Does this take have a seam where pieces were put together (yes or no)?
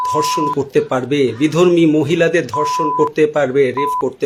no